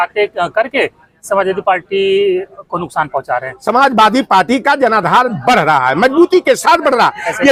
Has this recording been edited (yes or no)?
no